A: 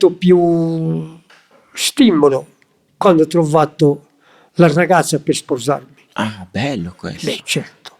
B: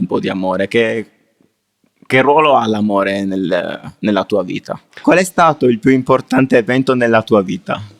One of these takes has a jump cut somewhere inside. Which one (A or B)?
B